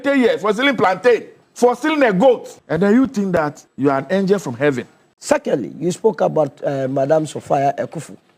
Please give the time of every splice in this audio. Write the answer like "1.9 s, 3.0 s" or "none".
1.4 s, 2.5 s, 3.6 s, 5.2 s